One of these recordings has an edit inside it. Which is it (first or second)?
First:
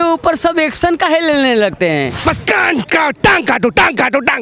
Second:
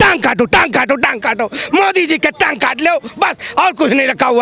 first